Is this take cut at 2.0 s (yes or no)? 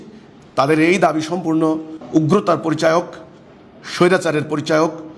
yes